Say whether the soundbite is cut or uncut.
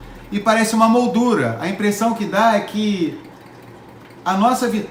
uncut